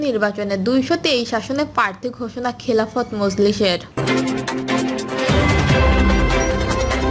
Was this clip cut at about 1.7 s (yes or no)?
no